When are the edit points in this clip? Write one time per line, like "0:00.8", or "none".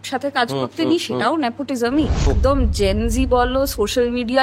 0:02.3